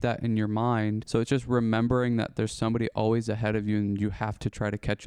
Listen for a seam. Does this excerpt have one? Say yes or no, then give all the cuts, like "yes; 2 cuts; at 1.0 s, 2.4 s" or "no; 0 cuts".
yes; 1 cut; at 1.0 s